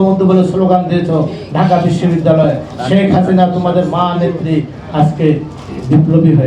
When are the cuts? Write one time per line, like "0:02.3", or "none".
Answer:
0:04.8